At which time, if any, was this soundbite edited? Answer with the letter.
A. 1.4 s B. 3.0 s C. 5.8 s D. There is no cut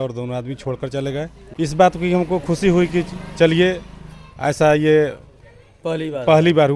A